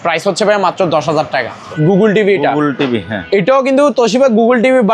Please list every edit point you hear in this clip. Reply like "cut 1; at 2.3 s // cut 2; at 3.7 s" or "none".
cut 1; at 1.7 s